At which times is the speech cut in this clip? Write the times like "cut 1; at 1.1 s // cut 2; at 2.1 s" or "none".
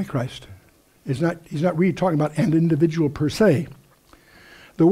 none